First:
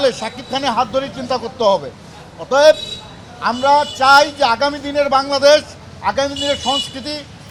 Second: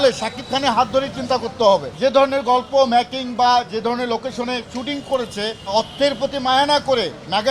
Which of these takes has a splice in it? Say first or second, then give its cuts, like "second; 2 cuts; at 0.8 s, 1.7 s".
second; 2 cuts; at 1.9 s, 5.6 s